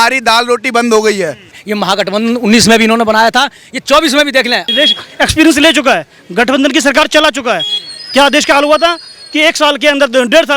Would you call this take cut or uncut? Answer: cut